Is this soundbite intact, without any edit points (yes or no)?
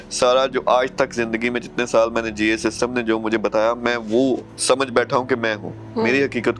no